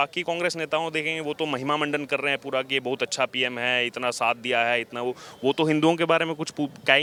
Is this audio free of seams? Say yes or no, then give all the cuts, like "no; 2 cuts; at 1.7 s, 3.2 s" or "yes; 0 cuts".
yes; 0 cuts